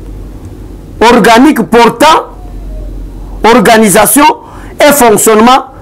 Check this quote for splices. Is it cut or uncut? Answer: uncut